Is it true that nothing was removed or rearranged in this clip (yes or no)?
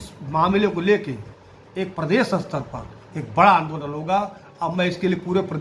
yes